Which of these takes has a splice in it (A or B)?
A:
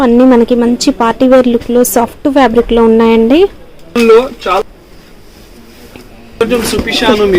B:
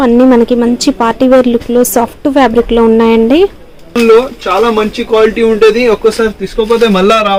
A